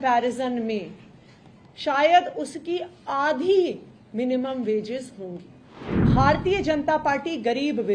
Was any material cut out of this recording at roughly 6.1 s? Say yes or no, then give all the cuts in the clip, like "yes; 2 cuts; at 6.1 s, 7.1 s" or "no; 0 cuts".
yes; 1 cut; at 6.1 s